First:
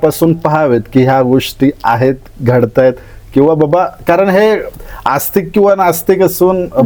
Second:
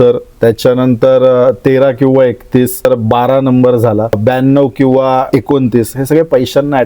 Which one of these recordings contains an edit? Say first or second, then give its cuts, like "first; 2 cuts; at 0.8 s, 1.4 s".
second; 3 cuts; at 2.8 s, 4.2 s, 5.3 s